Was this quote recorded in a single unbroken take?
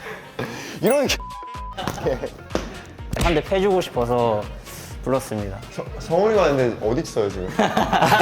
no; 1 cut; at 3.2 s

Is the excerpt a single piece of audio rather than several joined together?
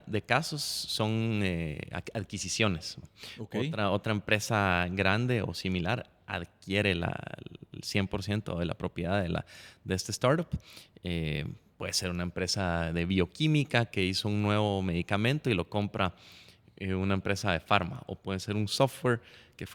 yes; 0 cuts

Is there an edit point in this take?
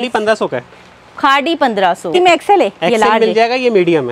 yes; 1 cut; at 2.1 s

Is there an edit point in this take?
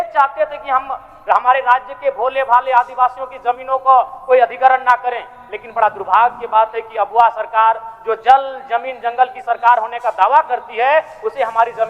no; 0 cuts

